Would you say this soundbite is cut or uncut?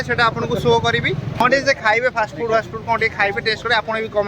cut